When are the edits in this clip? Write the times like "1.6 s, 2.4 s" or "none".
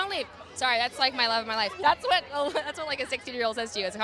1.7 s

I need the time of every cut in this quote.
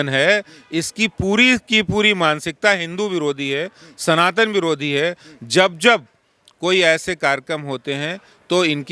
none

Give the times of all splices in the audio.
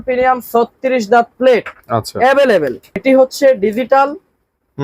3.0 s

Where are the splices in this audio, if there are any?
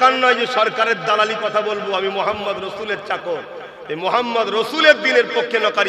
none

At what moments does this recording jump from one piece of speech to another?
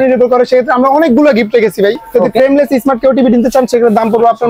2.2 s

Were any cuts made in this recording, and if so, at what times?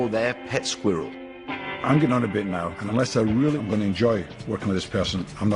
1.5 s, 2.8 s

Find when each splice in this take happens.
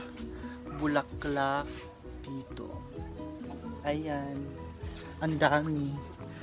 none

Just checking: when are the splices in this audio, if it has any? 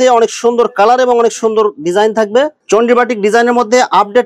2.6 s

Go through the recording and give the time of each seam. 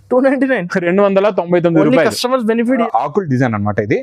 2.8 s

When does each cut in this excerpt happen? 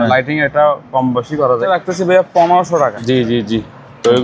1.7 s, 3.0 s

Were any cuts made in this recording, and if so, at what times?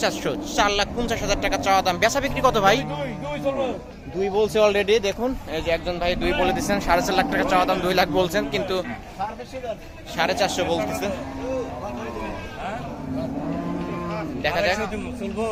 none

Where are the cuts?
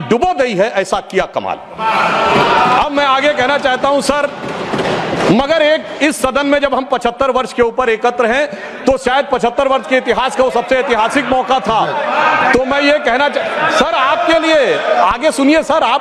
none

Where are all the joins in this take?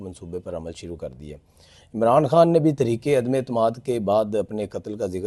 none

